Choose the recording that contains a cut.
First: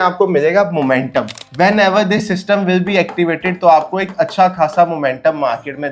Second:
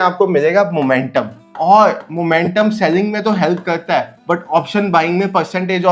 first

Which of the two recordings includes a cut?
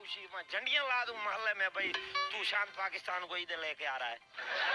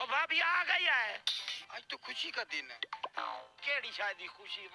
second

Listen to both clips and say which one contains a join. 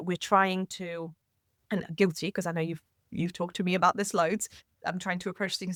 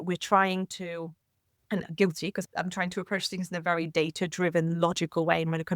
second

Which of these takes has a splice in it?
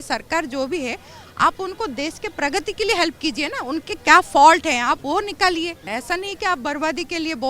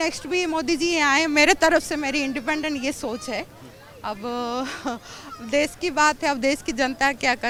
first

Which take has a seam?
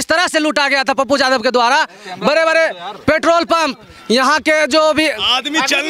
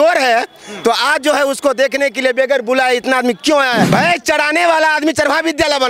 second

